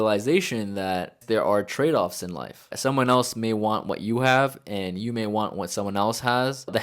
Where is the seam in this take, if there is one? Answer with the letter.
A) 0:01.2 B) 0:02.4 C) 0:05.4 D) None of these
D